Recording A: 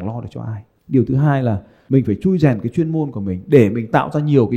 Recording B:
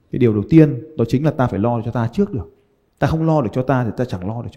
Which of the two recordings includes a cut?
A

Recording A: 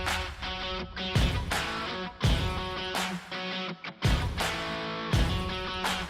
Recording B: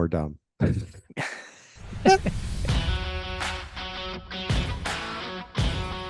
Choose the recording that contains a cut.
B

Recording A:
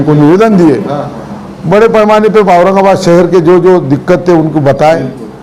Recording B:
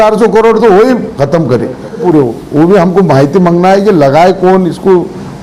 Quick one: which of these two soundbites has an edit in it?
B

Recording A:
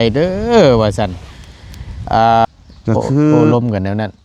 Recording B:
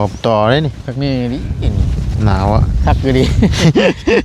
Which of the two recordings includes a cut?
A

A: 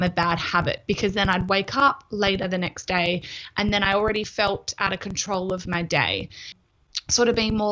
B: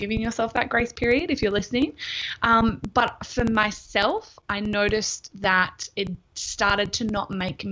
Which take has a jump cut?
A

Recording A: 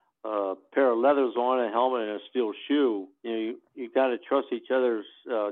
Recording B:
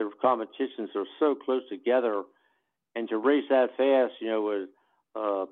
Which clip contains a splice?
A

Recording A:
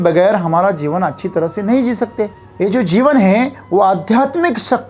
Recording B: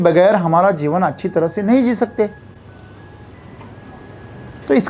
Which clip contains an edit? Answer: A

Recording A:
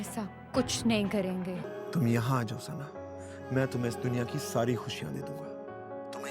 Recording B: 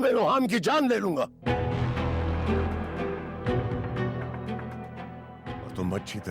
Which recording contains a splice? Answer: A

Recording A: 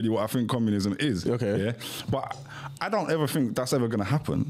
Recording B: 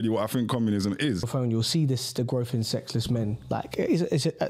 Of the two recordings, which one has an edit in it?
B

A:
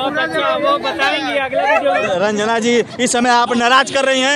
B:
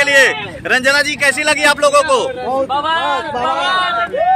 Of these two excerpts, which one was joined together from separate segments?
A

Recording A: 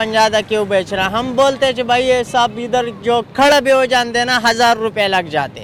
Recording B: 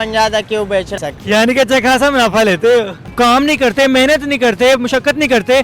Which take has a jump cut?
B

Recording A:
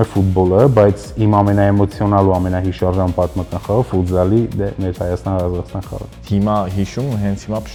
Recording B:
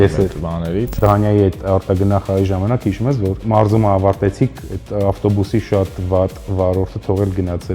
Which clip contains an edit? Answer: B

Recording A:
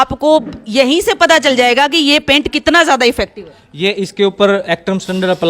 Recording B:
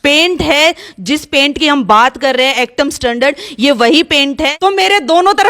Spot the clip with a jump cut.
B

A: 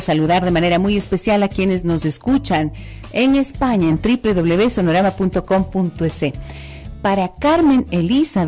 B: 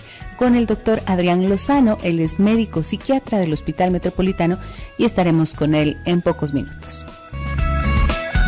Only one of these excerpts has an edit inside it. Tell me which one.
B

